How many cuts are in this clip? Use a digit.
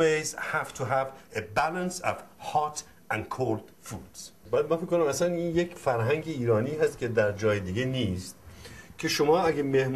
1